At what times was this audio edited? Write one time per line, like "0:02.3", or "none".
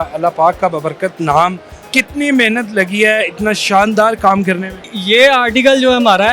0:01.7
0:04.9